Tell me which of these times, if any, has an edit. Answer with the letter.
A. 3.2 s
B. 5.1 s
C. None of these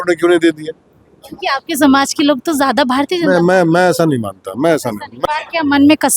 B